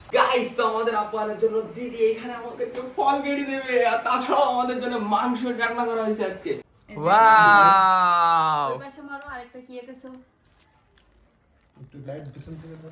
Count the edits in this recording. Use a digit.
1